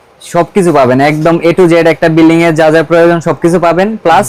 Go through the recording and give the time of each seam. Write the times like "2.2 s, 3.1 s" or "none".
none